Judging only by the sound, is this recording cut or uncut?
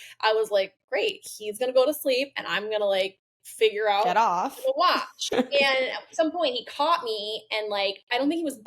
cut